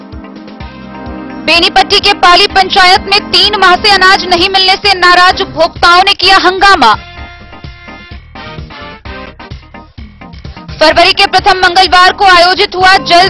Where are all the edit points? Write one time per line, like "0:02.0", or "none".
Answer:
0:01.3